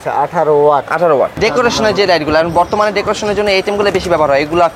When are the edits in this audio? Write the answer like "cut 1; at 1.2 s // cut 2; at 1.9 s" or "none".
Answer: cut 1; at 1.3 s